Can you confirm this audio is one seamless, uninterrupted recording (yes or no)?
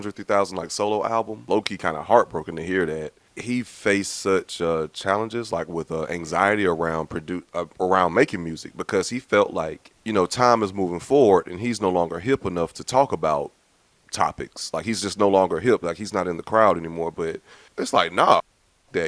no